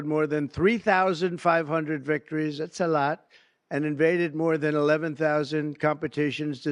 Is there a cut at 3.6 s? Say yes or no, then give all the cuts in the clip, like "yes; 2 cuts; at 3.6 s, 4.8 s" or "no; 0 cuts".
no; 0 cuts